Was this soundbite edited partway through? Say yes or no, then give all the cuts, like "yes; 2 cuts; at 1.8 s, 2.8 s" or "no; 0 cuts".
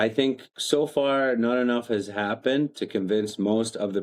no; 0 cuts